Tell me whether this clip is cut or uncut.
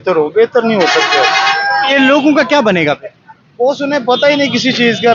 uncut